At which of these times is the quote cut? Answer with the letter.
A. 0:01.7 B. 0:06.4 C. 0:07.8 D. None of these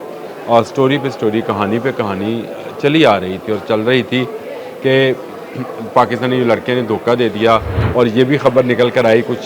C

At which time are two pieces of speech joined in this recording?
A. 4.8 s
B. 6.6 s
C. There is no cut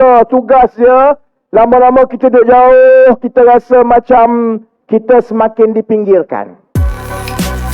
B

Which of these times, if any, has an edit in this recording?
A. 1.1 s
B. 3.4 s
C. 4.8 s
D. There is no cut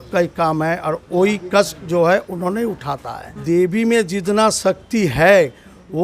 B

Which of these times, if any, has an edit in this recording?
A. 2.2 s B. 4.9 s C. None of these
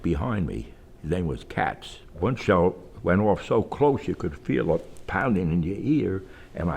A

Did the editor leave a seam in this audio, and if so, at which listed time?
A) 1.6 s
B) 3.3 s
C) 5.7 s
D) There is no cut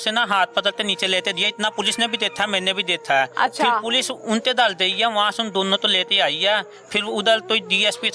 D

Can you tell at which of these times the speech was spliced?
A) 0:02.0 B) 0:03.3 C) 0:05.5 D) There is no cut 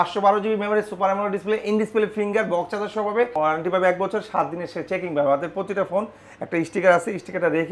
B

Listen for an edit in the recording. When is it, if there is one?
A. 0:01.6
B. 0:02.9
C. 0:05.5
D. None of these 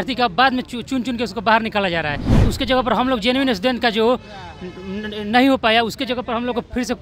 D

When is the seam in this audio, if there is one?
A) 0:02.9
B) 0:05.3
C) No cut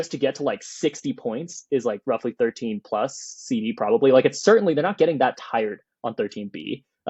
C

